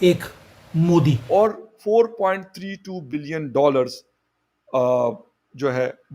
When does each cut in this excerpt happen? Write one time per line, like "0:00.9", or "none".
0:01.2